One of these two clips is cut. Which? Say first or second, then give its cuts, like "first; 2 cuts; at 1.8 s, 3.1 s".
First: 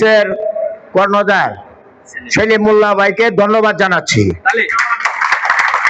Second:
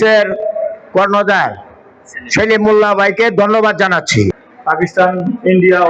second; 1 cut; at 4.4 s